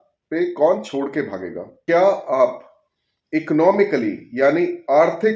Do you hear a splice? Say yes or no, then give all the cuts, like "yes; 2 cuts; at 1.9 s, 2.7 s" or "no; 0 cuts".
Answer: yes; 1 cut; at 1.8 s